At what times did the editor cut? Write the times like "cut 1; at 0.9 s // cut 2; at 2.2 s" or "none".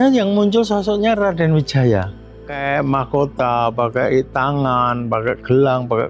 cut 1; at 2.5 s